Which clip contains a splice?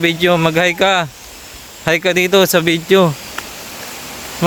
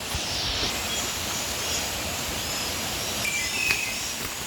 second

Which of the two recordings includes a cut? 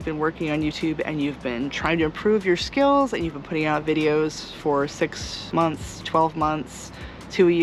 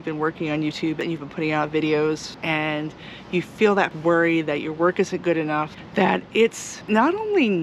second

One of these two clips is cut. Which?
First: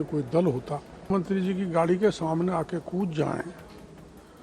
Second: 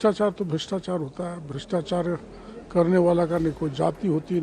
first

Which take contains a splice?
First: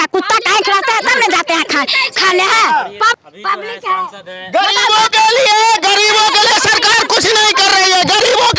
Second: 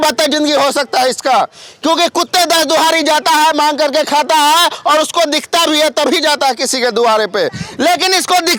first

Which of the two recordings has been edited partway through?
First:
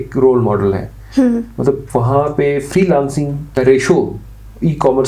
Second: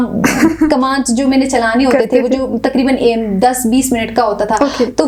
first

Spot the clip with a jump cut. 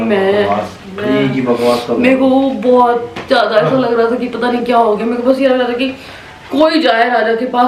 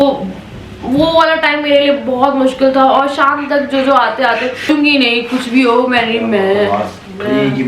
second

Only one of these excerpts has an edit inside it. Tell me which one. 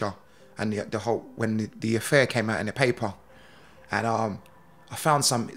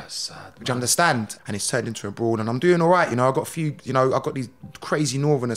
second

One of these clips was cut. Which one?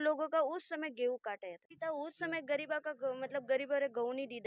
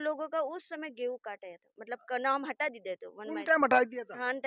first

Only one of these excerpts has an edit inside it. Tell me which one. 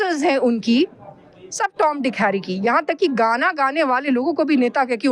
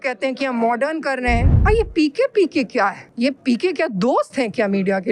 second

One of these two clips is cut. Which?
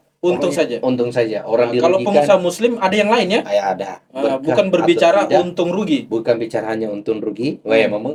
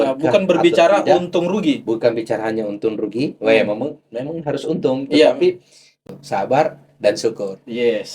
second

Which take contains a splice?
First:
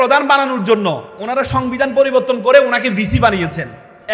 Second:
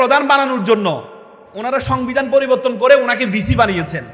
first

